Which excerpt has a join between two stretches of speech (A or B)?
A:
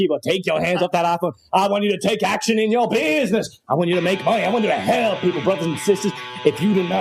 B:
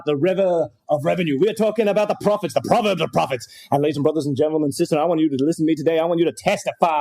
B